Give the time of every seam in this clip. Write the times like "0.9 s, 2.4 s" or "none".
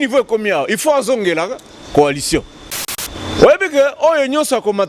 2.9 s